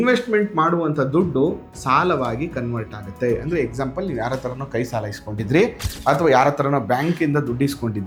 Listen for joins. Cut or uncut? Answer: uncut